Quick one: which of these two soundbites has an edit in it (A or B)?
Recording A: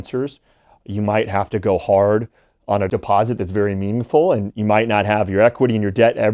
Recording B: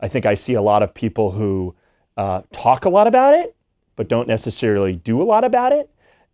A